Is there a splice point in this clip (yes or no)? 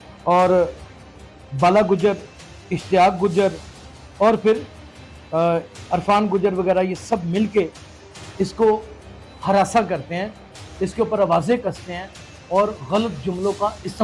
no